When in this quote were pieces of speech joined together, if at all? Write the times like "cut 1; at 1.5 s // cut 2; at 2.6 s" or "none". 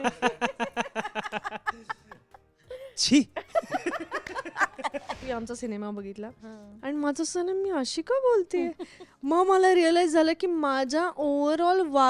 cut 1; at 5.2 s